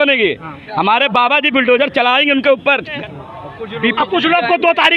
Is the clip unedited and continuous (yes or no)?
no